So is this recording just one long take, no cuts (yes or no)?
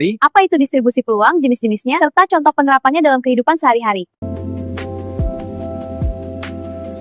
yes